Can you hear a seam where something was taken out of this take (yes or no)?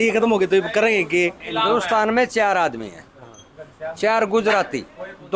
yes